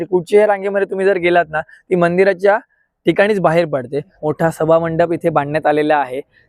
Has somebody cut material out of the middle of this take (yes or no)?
yes